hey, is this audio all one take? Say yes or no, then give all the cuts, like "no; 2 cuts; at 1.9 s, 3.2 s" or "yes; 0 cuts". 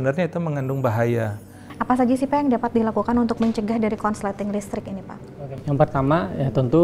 no; 1 cut; at 1.6 s